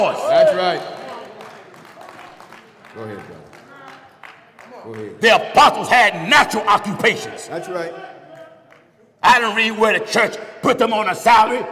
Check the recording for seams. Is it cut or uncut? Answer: uncut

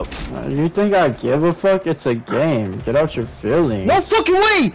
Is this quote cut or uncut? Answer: uncut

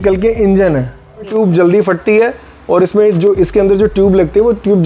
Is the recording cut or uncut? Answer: cut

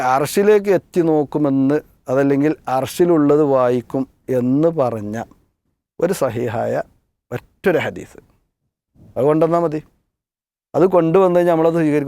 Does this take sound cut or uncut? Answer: uncut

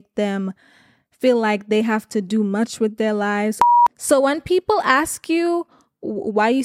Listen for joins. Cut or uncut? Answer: cut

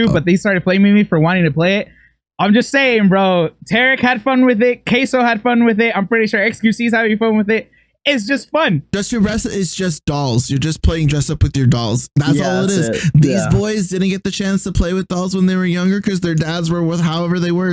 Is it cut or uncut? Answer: cut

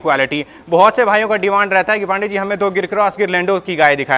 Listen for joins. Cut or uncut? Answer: uncut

